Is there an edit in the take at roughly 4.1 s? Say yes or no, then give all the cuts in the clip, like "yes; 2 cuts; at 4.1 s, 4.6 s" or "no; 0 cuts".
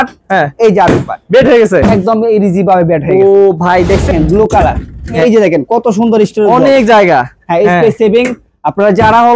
yes; 2 cuts; at 4.1 s, 5.2 s